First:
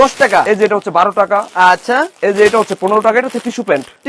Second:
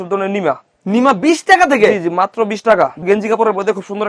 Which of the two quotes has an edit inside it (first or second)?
second